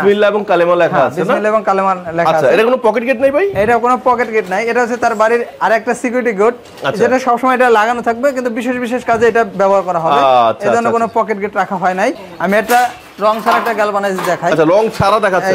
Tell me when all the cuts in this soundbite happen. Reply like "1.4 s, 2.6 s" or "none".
12.3 s